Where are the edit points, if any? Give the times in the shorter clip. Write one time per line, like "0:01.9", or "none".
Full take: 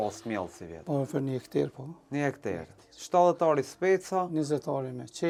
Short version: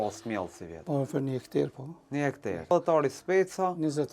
0:02.7

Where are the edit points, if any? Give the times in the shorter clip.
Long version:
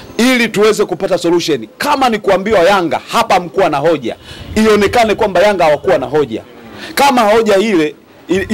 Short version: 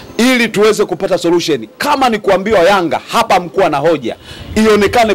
none

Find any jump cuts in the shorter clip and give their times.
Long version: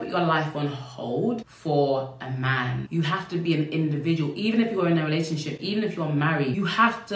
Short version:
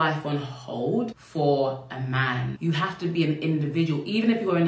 none

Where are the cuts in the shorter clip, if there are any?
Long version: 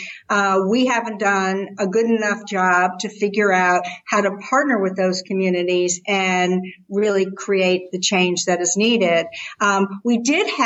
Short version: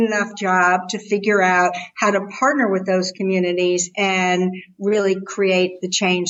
none

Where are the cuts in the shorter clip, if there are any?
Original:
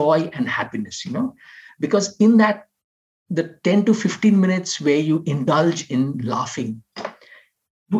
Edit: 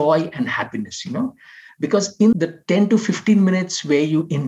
0:02.3

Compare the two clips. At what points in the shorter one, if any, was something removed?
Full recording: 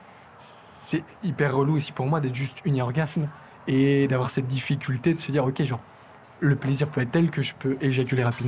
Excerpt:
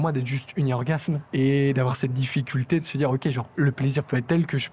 0:01.2
0:03.4

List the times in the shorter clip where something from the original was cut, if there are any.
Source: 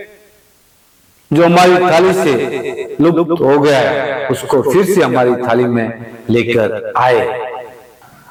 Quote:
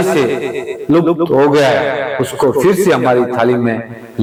none

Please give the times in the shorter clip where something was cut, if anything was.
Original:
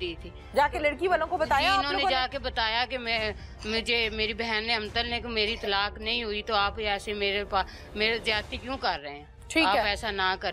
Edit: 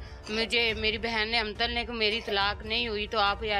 none

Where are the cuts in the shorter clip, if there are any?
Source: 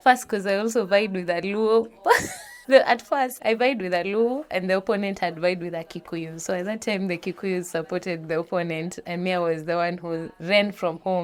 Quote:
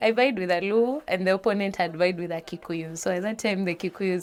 none

